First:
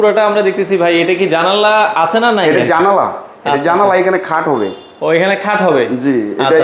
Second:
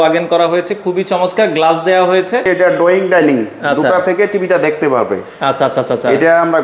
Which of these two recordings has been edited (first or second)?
second